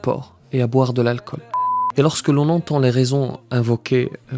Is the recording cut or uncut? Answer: cut